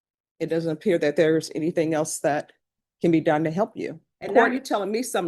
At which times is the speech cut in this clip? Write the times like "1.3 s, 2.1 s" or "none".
4.1 s